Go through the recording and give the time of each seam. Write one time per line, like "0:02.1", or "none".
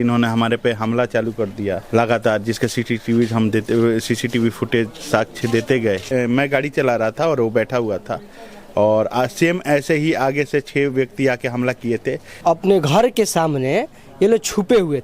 0:01.8
0:06.0
0:12.3